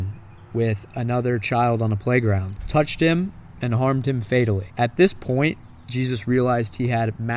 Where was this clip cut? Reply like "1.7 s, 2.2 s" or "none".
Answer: 2.5 s, 4.7 s